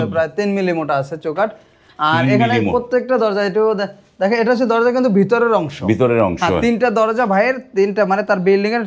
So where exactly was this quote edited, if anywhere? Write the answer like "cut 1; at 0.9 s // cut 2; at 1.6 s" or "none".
none